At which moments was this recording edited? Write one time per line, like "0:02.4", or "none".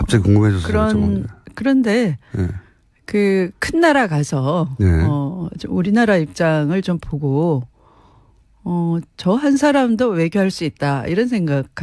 0:01.2